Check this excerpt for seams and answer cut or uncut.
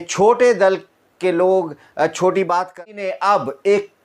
cut